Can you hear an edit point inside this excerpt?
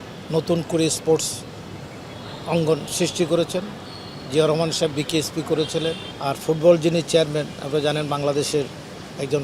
yes; 1 cut; at 6.1 s

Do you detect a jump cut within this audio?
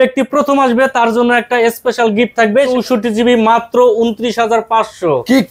yes; 1 cut; at 2.7 s

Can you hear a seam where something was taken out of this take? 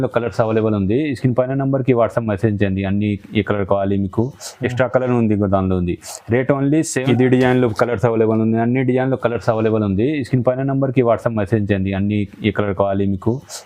no; 0 cuts

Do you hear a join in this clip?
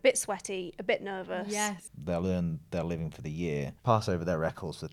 yes; 1 cut; at 1.8 s

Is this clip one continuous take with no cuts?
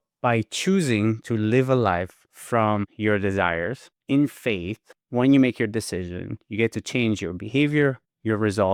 yes; 0 cuts

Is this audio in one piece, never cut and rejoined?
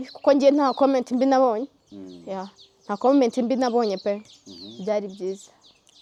yes; 0 cuts

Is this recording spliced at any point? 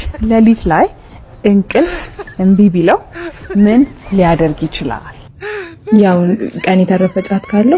no; 0 cuts

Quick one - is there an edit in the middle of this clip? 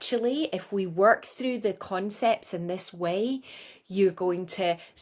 no; 0 cuts

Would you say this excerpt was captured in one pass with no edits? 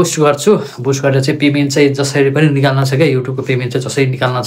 yes; 0 cuts

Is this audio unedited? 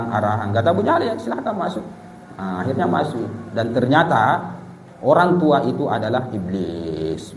yes; 0 cuts

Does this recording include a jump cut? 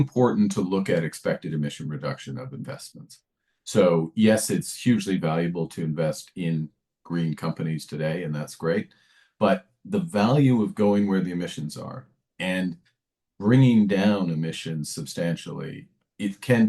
no; 0 cuts

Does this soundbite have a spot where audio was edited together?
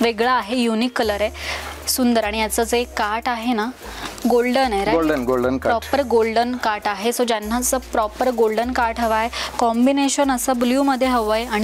no; 0 cuts

